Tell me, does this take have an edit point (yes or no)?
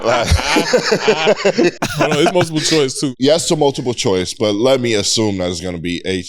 yes